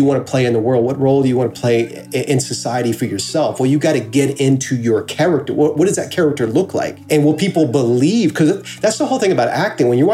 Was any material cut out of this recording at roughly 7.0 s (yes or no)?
yes